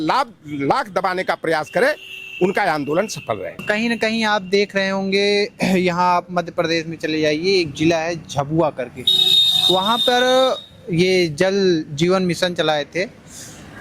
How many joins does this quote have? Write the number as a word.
zero